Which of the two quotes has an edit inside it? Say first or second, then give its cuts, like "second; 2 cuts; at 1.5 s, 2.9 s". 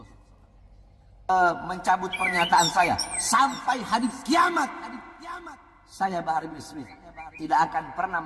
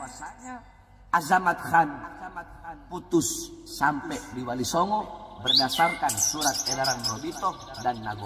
first; 1 cut; at 1.3 s